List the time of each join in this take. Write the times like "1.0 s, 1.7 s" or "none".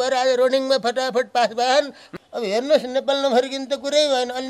2.0 s